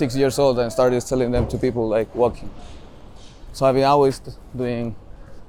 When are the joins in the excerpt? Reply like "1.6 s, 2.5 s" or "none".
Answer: none